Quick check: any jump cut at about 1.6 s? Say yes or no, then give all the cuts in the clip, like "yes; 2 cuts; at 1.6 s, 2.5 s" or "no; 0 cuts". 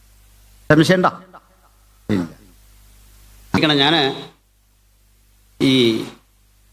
no; 1 cut; at 3.6 s